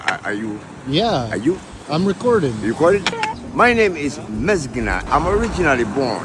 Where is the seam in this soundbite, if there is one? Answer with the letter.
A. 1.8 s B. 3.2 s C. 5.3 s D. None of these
B